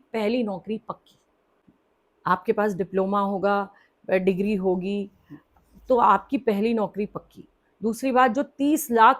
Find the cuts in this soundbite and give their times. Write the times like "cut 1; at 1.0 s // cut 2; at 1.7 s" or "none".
none